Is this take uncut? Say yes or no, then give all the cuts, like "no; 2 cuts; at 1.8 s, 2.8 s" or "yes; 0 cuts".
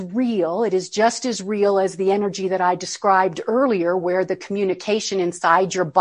yes; 0 cuts